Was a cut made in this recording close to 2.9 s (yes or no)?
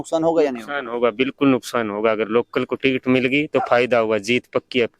no